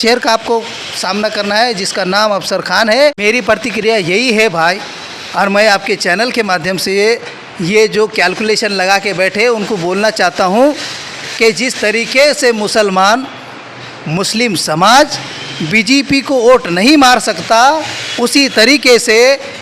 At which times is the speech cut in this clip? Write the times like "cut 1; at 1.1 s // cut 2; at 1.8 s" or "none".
cut 1; at 3.2 s